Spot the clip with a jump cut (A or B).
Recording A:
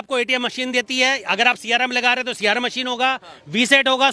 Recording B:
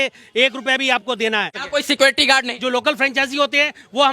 B